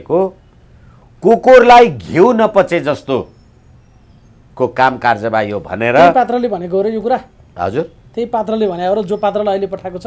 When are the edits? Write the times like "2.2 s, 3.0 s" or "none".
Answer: none